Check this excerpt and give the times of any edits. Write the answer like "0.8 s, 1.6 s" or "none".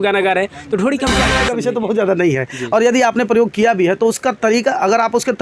1.4 s